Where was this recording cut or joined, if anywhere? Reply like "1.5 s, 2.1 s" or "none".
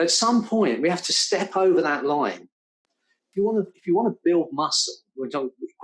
3.1 s